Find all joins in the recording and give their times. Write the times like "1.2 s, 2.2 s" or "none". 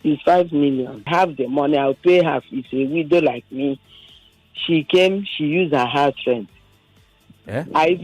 1.1 s